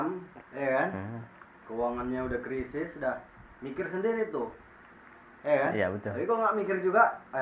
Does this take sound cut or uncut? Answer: uncut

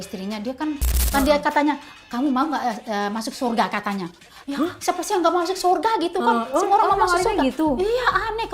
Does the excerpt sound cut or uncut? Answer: cut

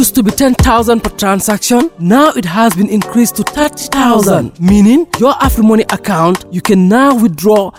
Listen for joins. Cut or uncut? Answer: uncut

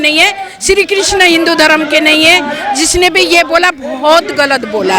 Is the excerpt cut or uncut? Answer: uncut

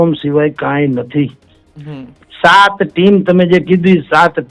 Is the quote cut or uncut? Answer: uncut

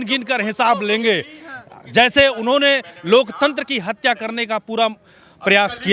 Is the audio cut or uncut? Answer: uncut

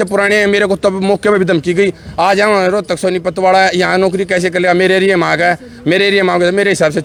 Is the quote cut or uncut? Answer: uncut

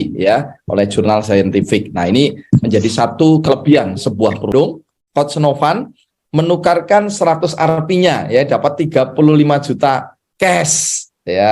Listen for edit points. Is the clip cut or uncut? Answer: cut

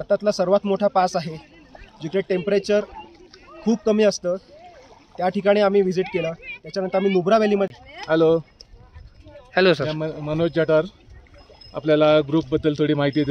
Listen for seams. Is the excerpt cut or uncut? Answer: cut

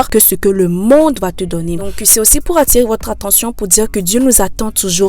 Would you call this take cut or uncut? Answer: cut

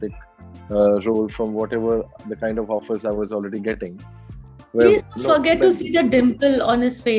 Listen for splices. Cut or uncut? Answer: uncut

